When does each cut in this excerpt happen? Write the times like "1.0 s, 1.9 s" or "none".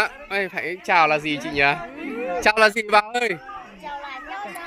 none